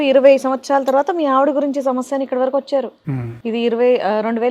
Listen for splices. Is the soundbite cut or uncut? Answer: uncut